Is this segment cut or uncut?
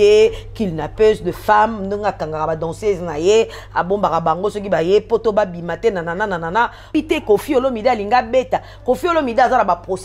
cut